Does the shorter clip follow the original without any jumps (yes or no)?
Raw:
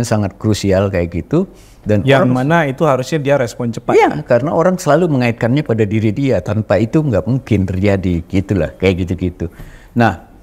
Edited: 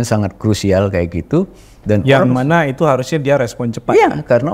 yes